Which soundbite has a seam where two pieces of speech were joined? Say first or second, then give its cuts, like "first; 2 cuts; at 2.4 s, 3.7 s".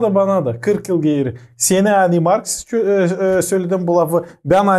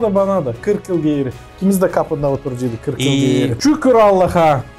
second; 2 cuts; at 1.4 s, 3.6 s